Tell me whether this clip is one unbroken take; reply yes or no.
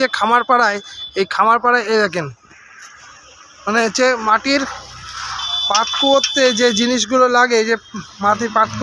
yes